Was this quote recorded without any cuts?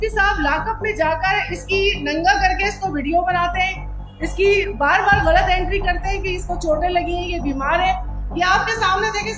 yes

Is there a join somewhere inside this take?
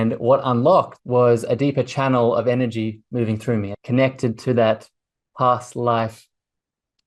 yes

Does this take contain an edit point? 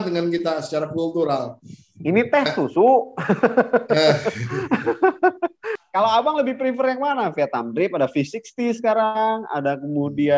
yes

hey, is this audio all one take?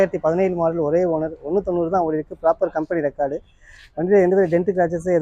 yes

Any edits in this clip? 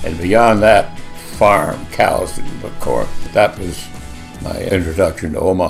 yes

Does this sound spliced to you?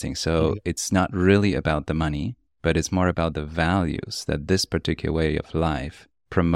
no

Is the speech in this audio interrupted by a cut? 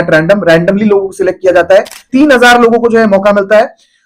yes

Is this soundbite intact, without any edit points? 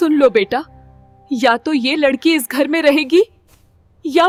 yes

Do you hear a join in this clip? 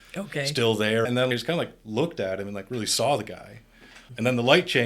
yes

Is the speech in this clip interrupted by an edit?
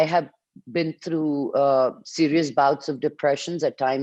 no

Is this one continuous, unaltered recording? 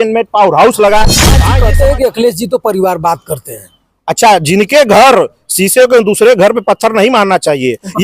no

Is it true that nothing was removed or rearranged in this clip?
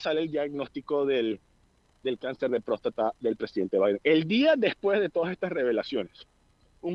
yes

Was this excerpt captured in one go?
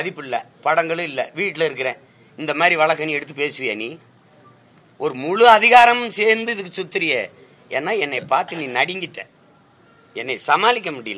yes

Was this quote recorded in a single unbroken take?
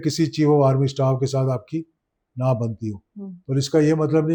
yes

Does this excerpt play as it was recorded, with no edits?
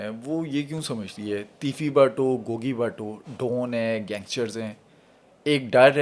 yes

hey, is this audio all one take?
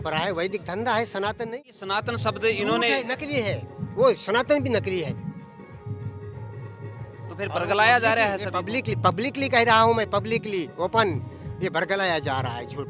no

